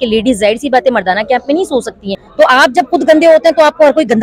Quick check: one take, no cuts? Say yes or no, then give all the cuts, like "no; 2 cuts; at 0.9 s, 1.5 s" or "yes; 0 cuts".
no; 1 cut; at 2.2 s